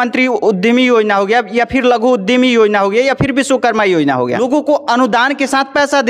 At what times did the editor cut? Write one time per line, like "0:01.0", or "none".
0:04.4